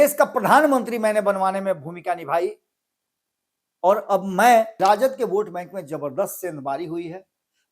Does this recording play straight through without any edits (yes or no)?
no